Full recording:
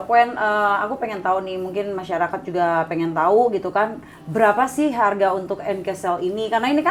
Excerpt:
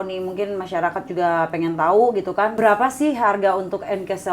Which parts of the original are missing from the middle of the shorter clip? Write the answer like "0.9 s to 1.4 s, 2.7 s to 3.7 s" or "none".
3.9 s to 4.3 s